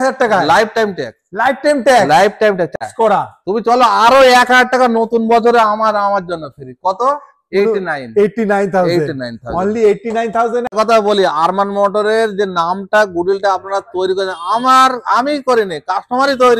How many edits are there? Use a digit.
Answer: 2